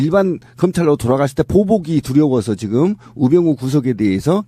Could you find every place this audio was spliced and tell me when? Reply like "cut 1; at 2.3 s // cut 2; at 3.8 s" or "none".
cut 1; at 2.3 s